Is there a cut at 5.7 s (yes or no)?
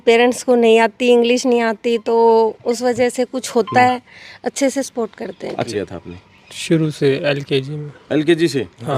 yes